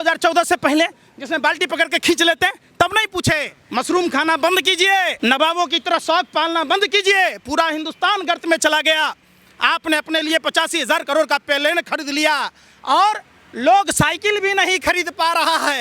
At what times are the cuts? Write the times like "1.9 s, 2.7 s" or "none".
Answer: 3.6 s, 5.1 s